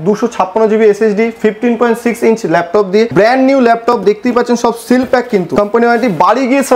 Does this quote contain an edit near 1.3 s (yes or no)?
no